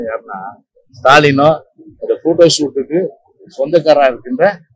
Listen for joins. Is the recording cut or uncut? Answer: uncut